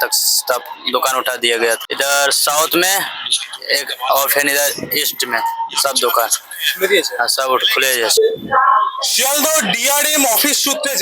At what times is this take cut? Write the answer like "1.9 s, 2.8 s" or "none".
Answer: 1.9 s, 8.1 s